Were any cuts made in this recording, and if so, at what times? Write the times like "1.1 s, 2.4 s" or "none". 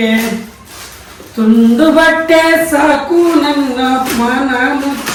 none